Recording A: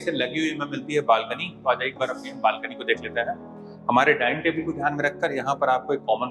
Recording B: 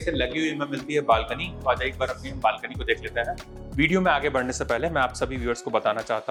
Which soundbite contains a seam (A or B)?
A